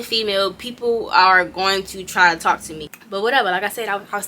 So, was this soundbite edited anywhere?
yes; 1 cut; at 2.8 s

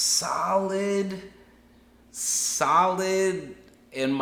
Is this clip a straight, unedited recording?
yes; 0 cuts

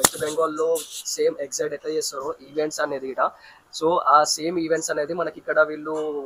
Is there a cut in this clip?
no; 0 cuts

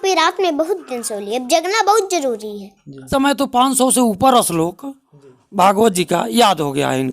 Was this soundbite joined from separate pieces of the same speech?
yes; 1 cut; at 3.1 s

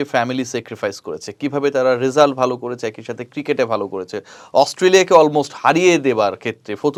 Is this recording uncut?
yes; 0 cuts

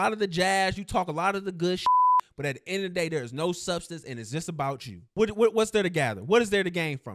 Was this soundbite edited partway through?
yes; 1 cut; at 4.9 s

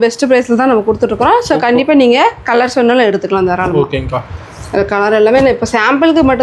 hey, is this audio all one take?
yes; 0 cuts

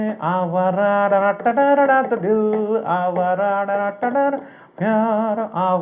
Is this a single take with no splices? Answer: yes; 0 cuts

